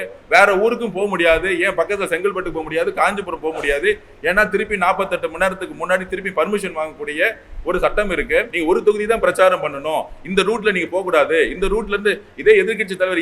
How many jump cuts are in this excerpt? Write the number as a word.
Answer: one